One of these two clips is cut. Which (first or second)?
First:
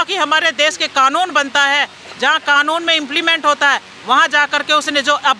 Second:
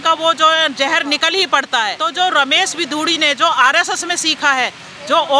second